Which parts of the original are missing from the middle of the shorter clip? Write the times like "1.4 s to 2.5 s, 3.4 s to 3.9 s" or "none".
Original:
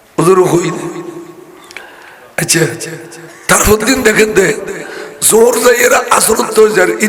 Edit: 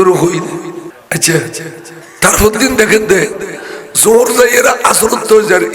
1.3 s to 2.2 s